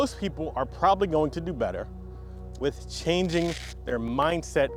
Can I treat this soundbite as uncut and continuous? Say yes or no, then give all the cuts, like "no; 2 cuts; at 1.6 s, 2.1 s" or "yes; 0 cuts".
yes; 0 cuts